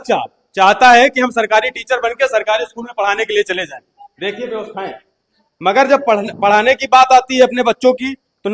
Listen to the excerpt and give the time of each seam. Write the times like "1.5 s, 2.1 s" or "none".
none